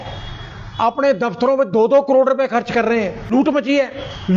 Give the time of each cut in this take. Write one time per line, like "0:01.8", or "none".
0:03.3